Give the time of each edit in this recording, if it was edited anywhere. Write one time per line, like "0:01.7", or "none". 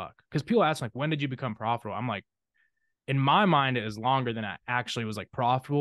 none